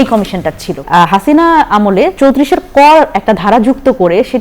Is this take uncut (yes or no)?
no